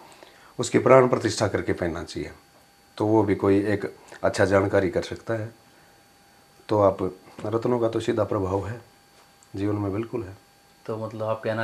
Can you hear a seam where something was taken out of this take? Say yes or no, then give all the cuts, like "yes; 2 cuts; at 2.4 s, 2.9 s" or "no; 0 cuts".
no; 0 cuts